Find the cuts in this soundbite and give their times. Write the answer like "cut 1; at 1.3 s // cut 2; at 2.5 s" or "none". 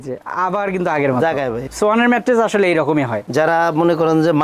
cut 1; at 1.6 s // cut 2; at 3.2 s